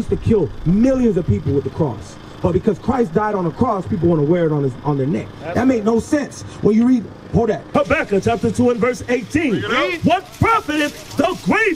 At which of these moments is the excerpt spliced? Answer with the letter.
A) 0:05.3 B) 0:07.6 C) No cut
B